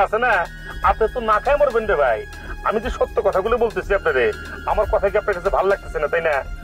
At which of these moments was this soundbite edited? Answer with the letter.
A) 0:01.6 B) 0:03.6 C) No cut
C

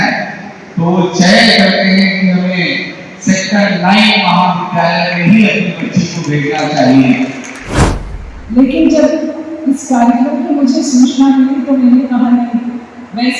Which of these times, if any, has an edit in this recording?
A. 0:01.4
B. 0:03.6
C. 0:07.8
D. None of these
C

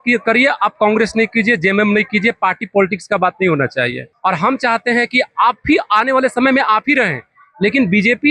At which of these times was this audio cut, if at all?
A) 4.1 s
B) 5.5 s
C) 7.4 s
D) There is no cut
A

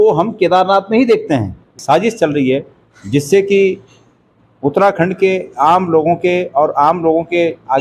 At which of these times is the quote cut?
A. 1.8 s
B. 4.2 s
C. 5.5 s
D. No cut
A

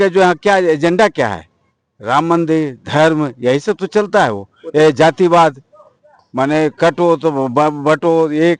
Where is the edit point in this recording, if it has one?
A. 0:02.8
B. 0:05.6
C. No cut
C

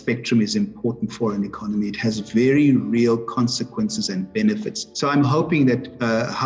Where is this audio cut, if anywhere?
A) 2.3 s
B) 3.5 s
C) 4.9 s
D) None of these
D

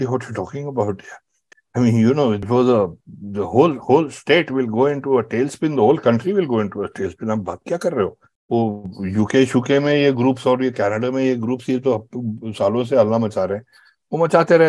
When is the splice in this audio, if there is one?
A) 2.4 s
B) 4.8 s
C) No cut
A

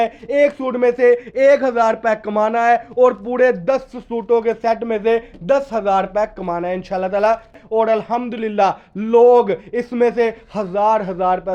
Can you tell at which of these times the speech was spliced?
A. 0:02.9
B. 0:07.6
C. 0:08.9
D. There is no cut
B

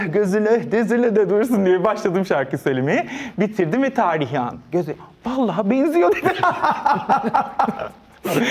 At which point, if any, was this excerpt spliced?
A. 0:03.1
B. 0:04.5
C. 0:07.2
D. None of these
D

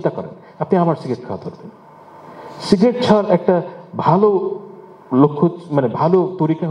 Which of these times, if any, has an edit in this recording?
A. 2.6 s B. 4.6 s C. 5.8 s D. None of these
D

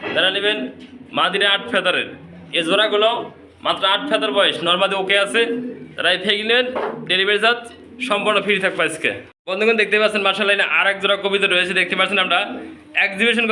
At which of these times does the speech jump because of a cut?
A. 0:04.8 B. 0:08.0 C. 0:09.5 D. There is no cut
D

